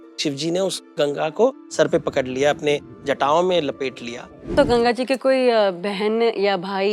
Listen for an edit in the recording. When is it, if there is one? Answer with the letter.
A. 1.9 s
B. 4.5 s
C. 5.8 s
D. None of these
B